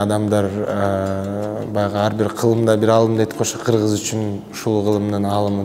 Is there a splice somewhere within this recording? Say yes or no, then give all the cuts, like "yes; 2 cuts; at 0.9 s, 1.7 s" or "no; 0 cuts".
no; 0 cuts